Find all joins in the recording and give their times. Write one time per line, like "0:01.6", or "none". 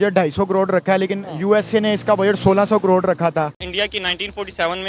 0:03.7